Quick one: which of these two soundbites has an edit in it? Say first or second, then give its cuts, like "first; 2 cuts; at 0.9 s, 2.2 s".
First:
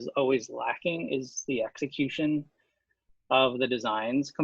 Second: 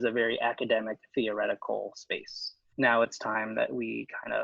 second; 1 cut; at 2.7 s